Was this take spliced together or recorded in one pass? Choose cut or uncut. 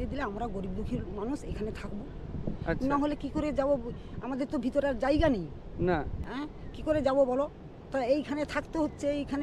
uncut